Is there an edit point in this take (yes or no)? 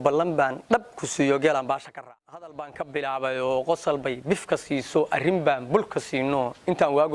yes